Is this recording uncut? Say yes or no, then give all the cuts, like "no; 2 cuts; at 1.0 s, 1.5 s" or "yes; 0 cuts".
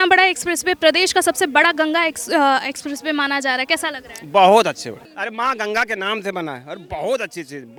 yes; 0 cuts